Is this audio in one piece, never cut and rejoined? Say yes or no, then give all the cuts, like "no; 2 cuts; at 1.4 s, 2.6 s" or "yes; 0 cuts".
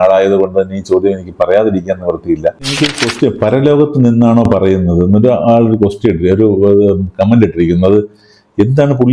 no; 1 cut; at 2.9 s